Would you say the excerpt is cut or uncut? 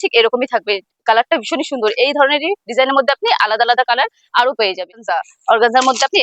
cut